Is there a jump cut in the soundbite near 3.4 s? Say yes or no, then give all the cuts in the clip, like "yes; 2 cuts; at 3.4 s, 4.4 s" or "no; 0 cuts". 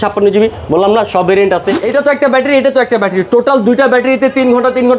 no; 1 cut; at 1.8 s